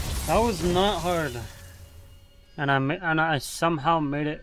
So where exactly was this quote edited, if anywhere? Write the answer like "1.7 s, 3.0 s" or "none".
none